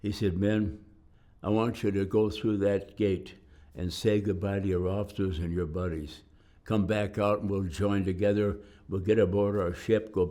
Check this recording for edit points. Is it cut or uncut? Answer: uncut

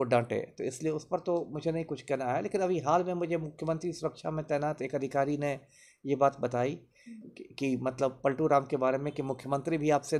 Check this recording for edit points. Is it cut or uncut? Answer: uncut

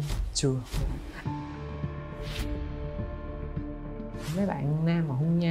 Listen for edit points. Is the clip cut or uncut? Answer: cut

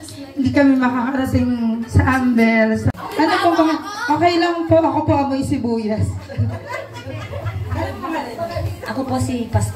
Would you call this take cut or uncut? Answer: cut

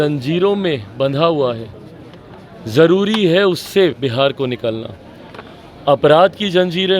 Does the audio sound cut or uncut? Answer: uncut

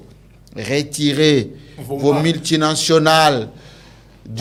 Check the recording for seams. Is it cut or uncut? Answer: uncut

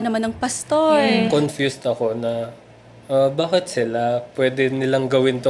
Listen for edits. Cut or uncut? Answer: cut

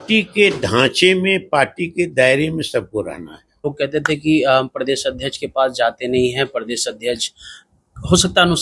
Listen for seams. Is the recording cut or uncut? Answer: cut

